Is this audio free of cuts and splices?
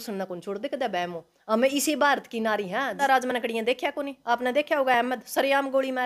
no; 1 cut; at 3.0 s

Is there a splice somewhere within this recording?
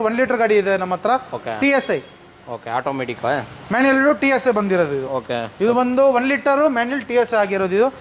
no; 0 cuts

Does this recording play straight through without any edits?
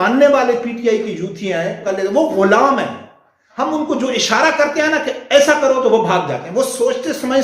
no; 1 cut; at 1.9 s

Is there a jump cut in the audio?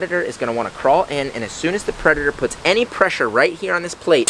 no; 0 cuts

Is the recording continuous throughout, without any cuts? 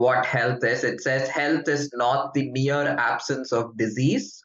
yes; 0 cuts

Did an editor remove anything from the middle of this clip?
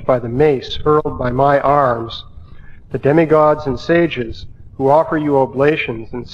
no; 0 cuts

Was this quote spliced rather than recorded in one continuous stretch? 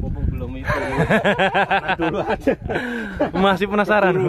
no; 0 cuts

